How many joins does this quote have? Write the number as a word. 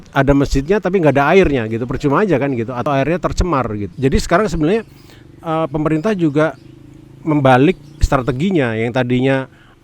two